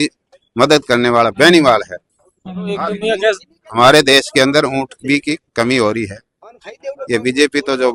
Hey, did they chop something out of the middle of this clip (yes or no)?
no